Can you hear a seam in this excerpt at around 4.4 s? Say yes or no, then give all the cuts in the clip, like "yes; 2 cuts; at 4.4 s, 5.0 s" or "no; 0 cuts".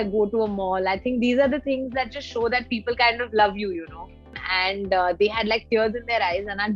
yes; 1 cut; at 4.4 s